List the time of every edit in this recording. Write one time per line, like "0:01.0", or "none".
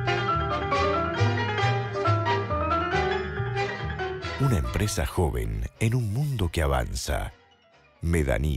0:04.3